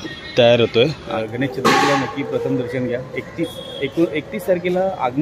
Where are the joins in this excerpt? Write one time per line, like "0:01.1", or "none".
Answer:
0:01.1